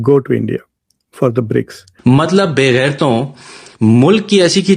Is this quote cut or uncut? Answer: cut